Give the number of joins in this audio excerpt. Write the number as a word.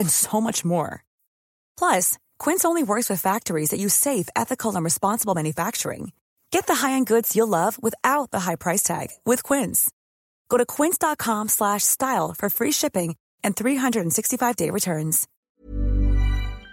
one